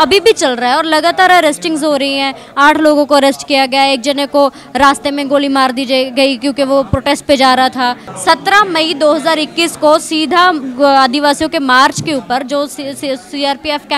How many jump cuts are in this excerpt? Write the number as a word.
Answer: one